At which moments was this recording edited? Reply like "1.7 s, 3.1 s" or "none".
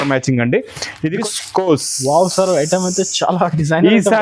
1.2 s